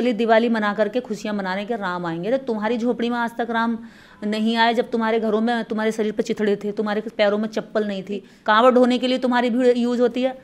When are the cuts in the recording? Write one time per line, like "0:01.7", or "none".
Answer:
0:08.3

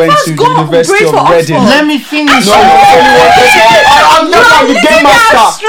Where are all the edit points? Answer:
none

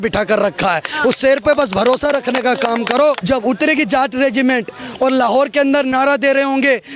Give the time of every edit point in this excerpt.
0:03.2

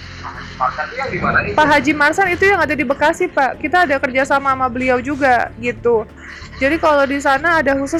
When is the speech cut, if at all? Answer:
none

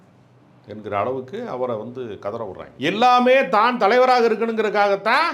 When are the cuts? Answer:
0:02.7

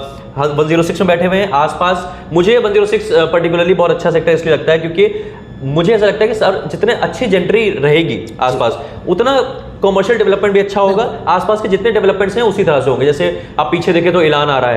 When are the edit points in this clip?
none

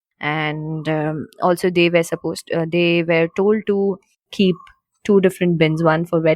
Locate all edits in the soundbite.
none

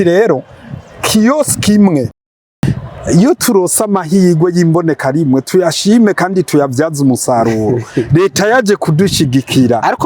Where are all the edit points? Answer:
0:02.5

